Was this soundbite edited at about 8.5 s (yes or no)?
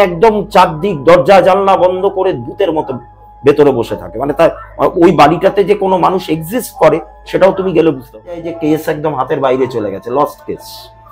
yes